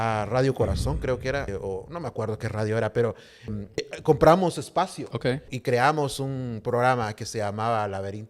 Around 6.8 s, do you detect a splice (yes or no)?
no